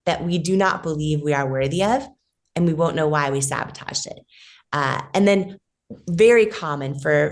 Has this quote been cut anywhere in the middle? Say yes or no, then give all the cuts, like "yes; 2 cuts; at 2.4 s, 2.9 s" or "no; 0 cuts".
no; 0 cuts